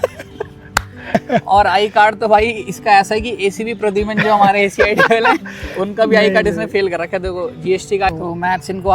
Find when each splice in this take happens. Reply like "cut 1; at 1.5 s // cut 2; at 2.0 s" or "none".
cut 1; at 1.1 s // cut 2; at 8.1 s